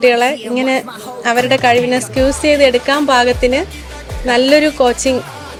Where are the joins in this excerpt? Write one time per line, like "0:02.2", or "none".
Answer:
none